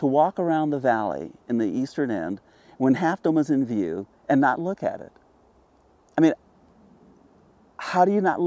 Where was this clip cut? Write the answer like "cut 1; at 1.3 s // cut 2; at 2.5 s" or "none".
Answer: none